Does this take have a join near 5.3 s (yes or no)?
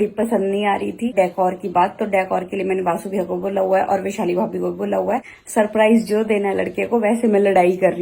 yes